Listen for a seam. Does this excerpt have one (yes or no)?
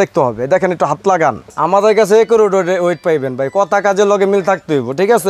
yes